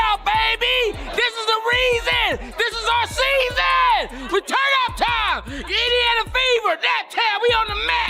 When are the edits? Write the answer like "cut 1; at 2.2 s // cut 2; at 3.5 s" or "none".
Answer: none